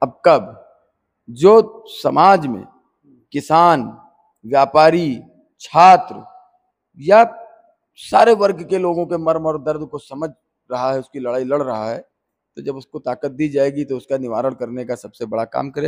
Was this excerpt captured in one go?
yes; 0 cuts

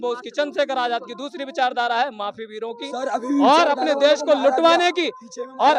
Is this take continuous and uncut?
yes; 0 cuts

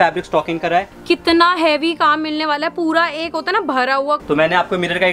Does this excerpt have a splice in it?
yes; 2 cuts; at 0.9 s, 4.2 s

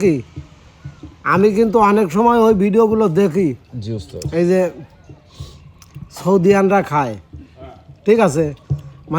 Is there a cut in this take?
no; 0 cuts

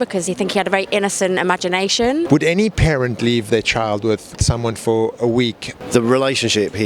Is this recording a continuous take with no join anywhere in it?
no; 3 cuts; at 2.3 s, 4.4 s, 5.8 s

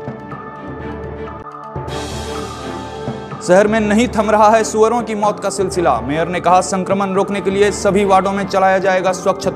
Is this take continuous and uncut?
no; 2 cuts; at 1.4 s, 3.2 s

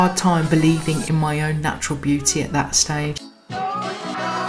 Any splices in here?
yes; 1 cut; at 3.3 s

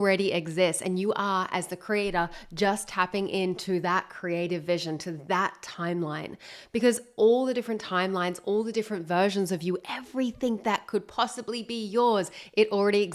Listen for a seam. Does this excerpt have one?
no; 0 cuts

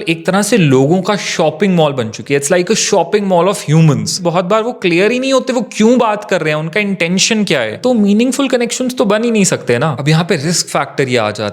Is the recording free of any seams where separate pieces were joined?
no; 3 cuts; at 4.2 s, 7.8 s, 10.0 s

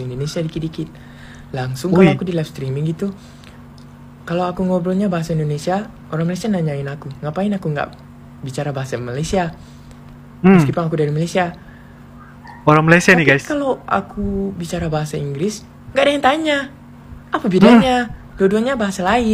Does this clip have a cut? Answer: no; 0 cuts

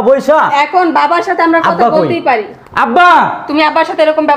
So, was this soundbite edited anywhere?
no; 0 cuts

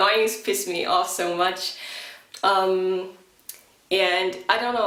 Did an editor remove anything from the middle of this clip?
no; 0 cuts

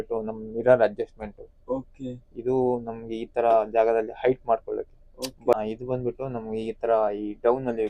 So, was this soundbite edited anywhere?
yes; 1 cut; at 5.5 s

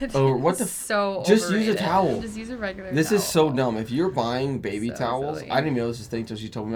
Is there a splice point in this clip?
no; 0 cuts

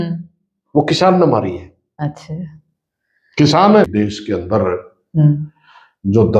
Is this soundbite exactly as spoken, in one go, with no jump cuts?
no; 1 cut; at 3.9 s

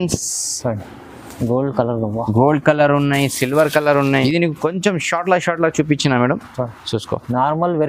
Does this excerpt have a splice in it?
yes; 1 cut; at 4.2 s

